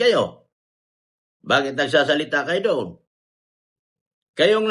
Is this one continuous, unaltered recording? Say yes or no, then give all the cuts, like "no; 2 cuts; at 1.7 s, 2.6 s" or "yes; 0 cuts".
yes; 0 cuts